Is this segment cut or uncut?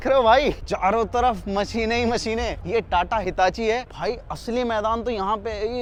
uncut